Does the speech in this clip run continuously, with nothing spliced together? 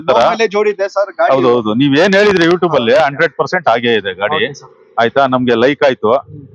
yes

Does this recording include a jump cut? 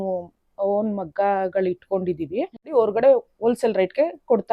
yes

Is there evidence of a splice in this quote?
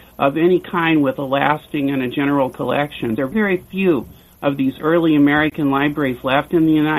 yes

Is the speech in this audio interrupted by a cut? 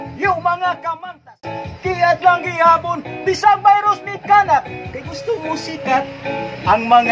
no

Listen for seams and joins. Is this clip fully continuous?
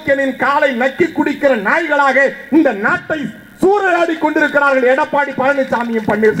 yes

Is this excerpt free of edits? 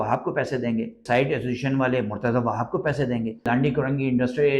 no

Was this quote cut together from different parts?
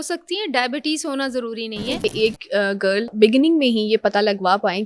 yes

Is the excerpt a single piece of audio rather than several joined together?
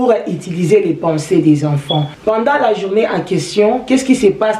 no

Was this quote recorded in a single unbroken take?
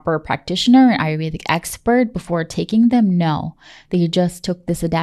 yes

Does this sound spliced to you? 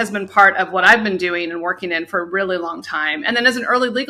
no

